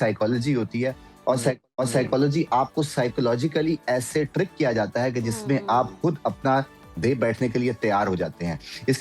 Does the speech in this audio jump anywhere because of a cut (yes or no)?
no